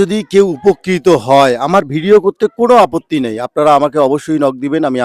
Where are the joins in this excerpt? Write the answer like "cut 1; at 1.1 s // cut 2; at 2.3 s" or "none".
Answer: none